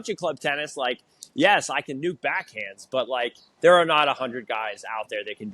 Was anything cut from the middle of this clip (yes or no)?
yes